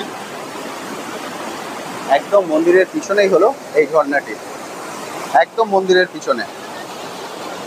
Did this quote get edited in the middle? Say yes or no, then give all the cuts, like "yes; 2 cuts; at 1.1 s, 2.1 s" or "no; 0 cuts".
no; 0 cuts